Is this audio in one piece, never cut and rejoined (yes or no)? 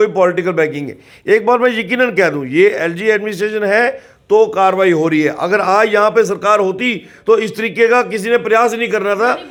yes